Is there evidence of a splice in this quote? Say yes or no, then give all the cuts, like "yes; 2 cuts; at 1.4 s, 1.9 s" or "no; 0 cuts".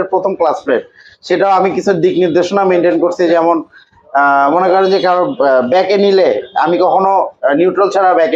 no; 0 cuts